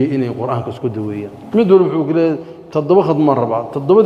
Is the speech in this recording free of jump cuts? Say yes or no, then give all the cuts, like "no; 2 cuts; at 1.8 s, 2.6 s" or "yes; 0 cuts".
no; 1 cut; at 1.3 s